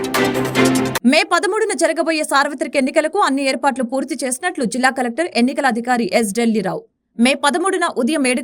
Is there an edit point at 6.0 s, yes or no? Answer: no